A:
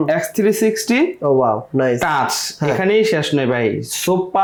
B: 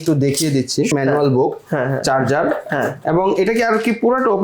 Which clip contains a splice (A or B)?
B